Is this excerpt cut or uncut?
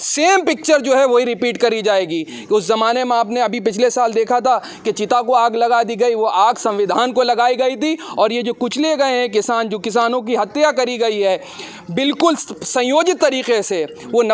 uncut